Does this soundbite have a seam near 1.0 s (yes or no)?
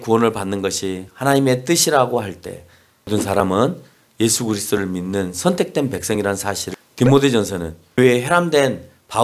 no